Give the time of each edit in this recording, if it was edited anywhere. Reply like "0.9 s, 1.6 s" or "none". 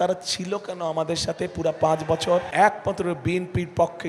2.5 s